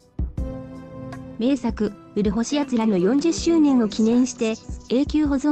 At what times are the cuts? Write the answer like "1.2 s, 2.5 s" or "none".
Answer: 1.4 s